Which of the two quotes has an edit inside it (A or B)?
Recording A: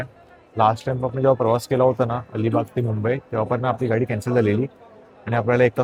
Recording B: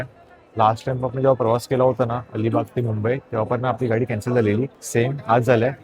B